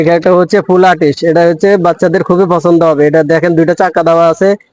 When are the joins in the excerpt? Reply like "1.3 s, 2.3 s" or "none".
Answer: none